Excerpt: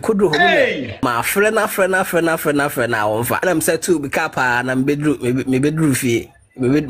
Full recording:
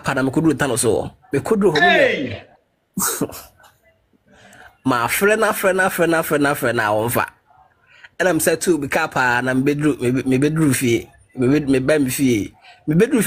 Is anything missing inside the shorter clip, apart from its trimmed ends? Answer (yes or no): yes